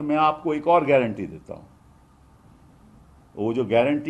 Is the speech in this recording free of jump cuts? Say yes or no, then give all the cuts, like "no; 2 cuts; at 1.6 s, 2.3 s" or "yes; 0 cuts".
yes; 0 cuts